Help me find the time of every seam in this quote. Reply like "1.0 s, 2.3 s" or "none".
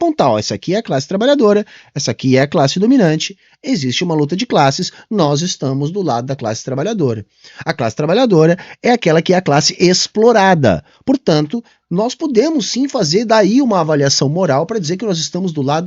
none